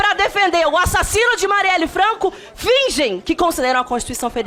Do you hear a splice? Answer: no; 0 cuts

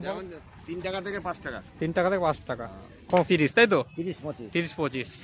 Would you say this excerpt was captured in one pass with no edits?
no; 1 cut; at 3.3 s

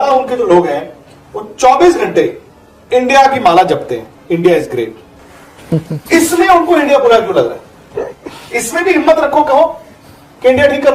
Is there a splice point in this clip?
no; 0 cuts

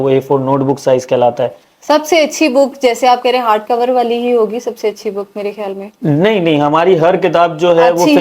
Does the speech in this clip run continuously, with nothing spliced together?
no; 1 cut; at 1.7 s

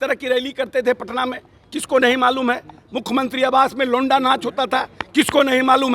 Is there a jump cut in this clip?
no; 0 cuts

